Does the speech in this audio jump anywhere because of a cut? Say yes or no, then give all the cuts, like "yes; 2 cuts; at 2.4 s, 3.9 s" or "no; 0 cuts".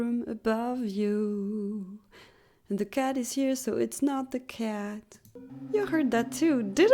yes; 1 cut; at 5.4 s